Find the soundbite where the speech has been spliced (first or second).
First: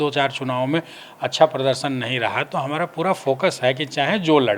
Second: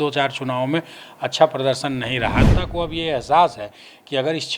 second